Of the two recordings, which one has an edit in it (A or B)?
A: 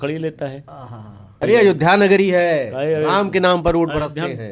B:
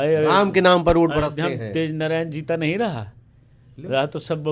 A